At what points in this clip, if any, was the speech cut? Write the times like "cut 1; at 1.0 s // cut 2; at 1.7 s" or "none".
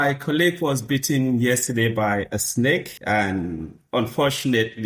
cut 1; at 2.9 s